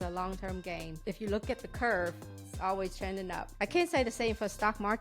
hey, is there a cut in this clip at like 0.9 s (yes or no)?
yes